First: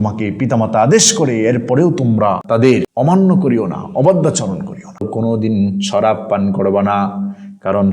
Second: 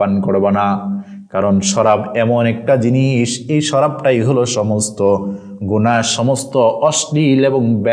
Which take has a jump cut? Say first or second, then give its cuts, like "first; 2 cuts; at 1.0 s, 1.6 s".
first; 2 cuts; at 2.5 s, 5.1 s